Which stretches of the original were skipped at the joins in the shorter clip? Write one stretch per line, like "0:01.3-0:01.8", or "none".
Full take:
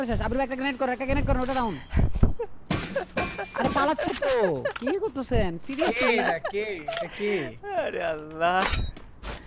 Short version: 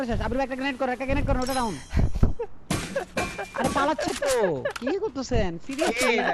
none

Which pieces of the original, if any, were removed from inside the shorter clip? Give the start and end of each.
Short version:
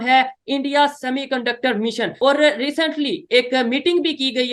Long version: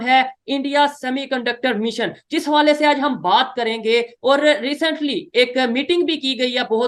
0:02.1-0:04.1

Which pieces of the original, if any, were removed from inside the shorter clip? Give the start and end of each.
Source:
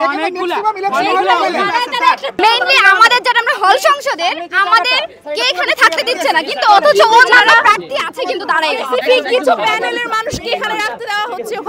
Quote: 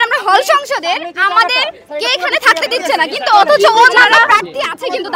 none

